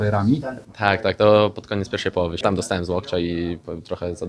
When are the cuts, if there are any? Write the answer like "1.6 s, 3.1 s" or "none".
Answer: 2.4 s